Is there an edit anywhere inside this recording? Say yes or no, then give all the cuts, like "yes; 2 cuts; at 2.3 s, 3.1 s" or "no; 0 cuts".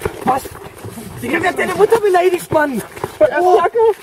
no; 0 cuts